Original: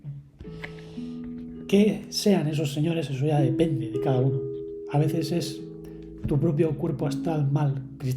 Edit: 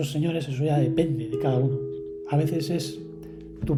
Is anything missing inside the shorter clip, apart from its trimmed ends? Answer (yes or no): no